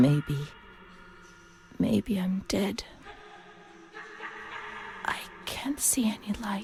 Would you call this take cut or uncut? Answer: uncut